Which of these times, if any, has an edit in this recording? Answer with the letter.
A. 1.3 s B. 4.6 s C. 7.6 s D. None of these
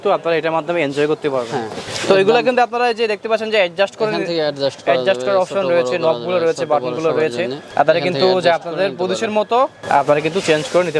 D